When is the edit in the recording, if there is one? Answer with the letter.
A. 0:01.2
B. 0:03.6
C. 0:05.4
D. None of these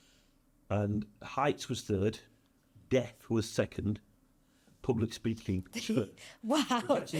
D